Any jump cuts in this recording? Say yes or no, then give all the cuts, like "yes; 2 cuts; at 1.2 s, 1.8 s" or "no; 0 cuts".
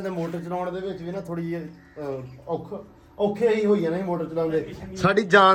no; 0 cuts